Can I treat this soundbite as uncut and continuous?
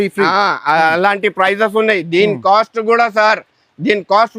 yes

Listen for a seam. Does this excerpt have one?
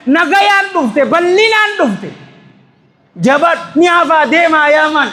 no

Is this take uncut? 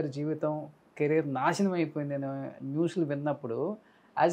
yes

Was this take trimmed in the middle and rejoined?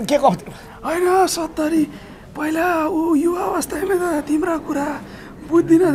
no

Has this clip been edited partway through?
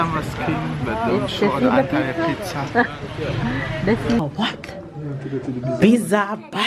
yes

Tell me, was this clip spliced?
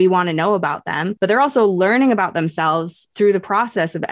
yes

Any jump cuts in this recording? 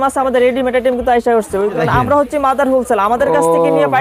yes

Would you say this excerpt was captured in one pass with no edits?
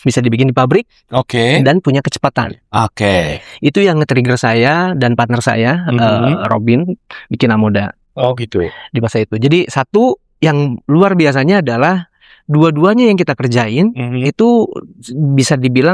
yes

